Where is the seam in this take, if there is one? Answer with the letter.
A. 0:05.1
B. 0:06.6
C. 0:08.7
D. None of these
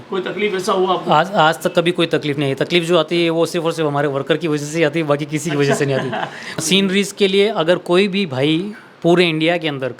B